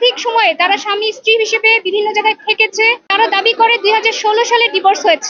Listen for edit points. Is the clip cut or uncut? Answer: cut